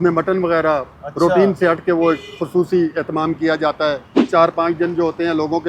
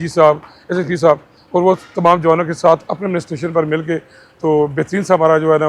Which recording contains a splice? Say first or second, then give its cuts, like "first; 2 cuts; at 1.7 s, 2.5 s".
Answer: first; 1 cut; at 4.2 s